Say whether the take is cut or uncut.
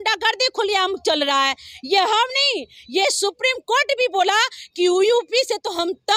uncut